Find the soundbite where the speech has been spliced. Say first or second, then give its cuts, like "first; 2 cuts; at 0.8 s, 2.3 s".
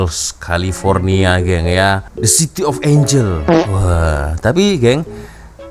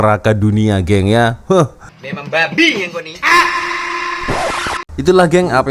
second; 1 cut; at 4.8 s